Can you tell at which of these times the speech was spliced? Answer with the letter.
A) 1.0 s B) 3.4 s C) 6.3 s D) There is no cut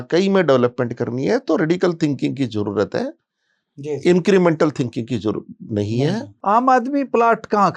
C